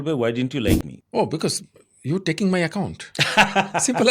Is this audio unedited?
no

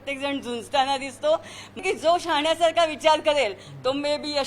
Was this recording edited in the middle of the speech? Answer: yes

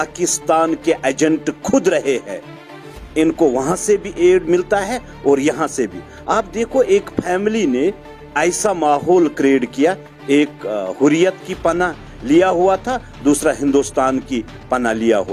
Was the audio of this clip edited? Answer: no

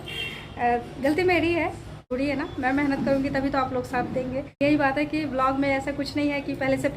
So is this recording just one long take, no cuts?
no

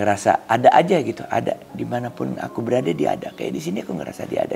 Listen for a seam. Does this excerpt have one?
no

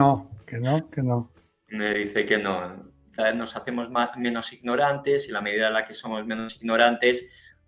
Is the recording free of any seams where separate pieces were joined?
no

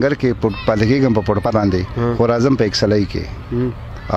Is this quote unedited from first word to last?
no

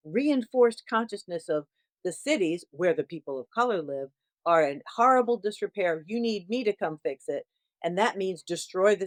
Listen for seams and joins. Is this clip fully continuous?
yes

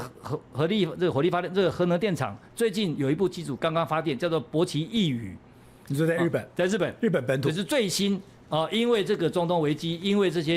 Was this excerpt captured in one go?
yes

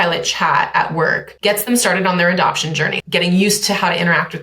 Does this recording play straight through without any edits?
no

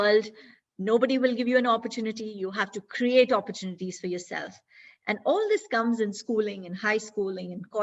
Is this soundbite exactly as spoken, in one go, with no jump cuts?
yes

